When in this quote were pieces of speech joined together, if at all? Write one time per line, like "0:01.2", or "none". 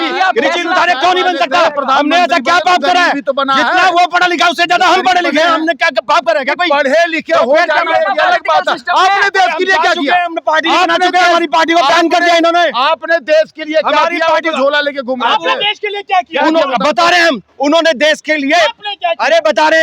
none